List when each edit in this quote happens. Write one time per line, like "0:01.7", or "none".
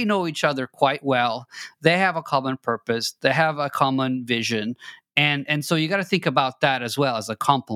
none